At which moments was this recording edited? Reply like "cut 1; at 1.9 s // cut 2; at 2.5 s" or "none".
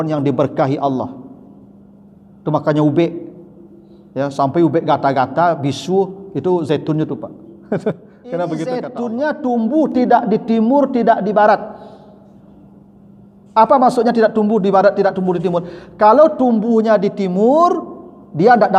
cut 1; at 8.9 s